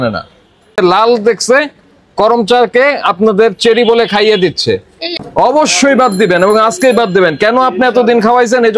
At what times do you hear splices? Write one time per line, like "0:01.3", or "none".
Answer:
0:00.8
0:05.0